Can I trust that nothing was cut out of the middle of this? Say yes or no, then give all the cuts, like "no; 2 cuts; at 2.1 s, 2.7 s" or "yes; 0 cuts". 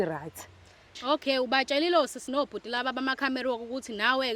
no; 1 cut; at 1.0 s